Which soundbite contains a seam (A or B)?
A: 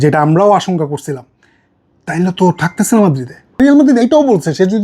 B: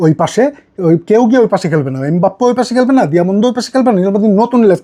A